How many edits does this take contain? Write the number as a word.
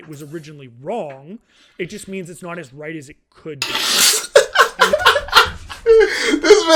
zero